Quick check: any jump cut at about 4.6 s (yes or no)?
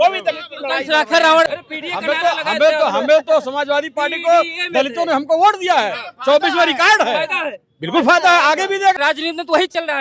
no